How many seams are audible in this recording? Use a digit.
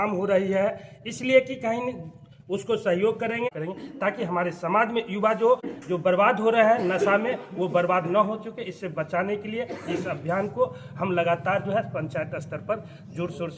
2